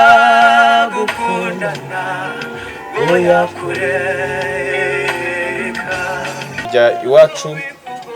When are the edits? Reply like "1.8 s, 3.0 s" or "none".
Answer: 6.7 s